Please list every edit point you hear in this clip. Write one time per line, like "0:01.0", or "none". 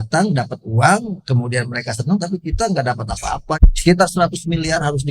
0:03.5